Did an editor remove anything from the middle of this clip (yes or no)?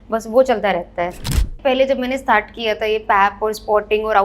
yes